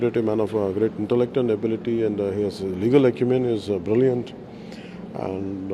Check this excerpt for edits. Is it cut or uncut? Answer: uncut